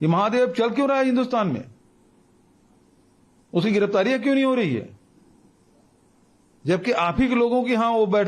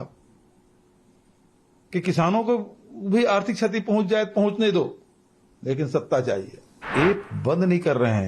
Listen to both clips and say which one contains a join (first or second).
second